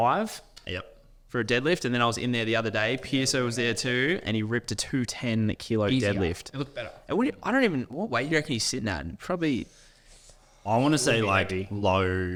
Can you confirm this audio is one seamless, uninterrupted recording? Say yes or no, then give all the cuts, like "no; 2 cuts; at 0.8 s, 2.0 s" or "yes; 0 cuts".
yes; 0 cuts